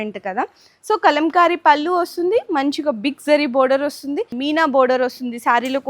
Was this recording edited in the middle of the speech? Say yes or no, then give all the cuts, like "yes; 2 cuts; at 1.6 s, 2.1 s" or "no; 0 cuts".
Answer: yes; 1 cut; at 4.3 s